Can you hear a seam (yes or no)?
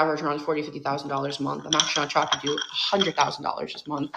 no